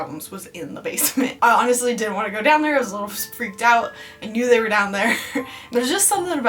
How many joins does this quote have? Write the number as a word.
one